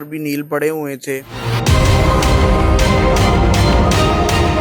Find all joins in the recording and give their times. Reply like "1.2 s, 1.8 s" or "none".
none